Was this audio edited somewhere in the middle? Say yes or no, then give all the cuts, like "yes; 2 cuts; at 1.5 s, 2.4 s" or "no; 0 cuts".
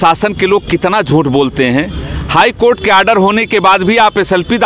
no; 0 cuts